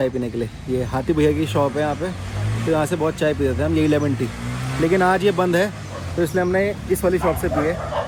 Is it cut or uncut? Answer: uncut